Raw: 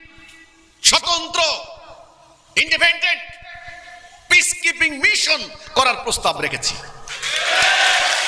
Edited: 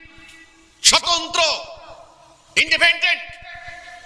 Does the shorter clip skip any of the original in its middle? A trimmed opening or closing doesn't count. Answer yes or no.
no